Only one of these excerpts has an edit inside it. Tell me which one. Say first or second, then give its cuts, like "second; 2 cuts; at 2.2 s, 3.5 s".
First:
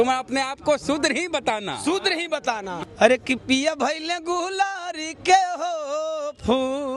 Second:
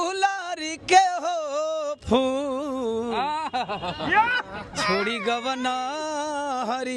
first; 1 cut; at 2.8 s